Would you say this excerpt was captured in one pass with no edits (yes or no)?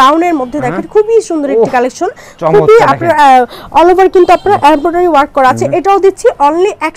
yes